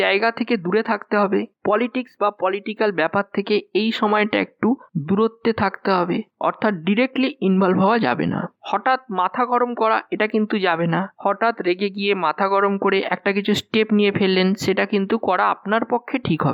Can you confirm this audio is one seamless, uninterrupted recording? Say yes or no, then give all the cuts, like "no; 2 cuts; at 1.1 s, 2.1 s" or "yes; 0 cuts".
yes; 0 cuts